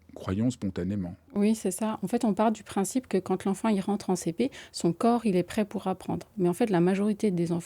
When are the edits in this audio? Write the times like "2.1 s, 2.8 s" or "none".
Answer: 1.2 s